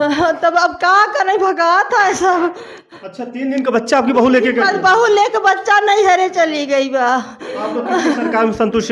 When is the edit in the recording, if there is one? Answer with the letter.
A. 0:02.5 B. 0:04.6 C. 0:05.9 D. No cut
D